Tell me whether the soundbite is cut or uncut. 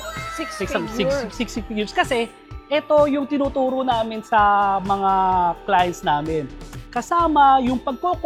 uncut